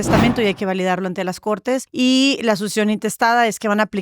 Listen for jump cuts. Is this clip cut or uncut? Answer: cut